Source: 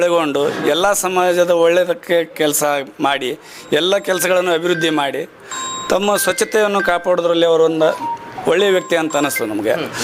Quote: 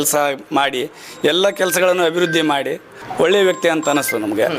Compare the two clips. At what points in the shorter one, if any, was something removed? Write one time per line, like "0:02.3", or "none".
0:03.0